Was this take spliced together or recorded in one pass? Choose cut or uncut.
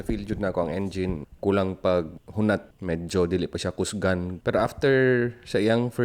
cut